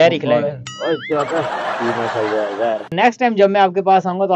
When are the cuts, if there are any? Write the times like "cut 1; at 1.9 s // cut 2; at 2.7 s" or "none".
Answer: cut 1; at 2.9 s